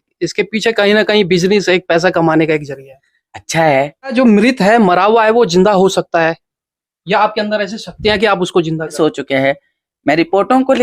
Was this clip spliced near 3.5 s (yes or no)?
yes